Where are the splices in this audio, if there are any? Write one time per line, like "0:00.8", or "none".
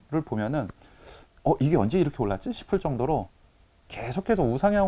none